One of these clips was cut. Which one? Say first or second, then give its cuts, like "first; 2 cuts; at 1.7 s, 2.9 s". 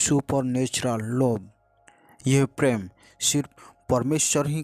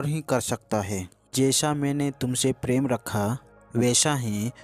second; 1 cut; at 1.3 s